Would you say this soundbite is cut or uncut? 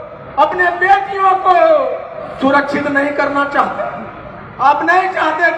uncut